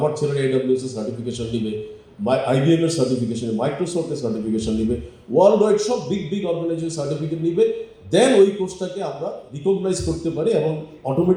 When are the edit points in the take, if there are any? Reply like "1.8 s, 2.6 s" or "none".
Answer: none